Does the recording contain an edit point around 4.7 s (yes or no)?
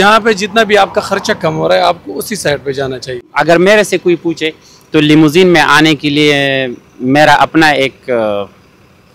no